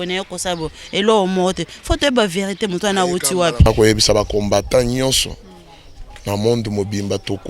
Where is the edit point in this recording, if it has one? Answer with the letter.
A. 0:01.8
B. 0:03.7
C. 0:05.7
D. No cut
B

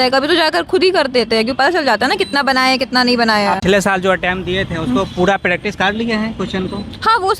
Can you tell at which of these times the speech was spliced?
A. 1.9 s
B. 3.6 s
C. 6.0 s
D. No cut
B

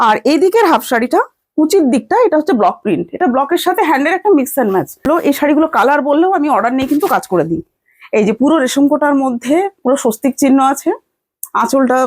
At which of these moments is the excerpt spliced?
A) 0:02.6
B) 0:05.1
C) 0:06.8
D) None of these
B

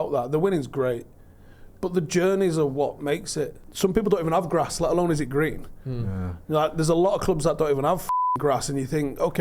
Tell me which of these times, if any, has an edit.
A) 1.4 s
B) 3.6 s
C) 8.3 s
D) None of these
B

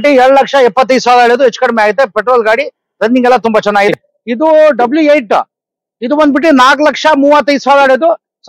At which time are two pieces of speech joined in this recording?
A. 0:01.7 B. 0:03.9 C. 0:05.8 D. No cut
B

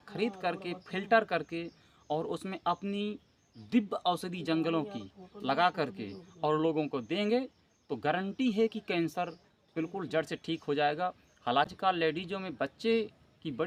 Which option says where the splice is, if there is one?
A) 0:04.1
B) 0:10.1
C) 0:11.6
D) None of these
D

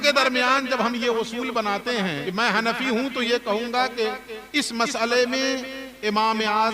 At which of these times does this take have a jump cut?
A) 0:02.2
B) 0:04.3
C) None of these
A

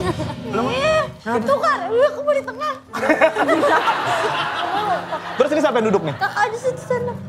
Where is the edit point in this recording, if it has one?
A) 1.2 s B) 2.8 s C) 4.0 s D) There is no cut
A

